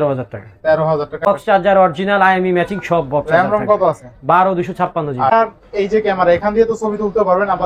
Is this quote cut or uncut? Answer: cut